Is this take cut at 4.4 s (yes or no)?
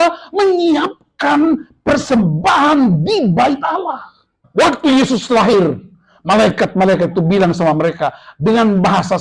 yes